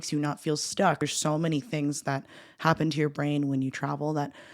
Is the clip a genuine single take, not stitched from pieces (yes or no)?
no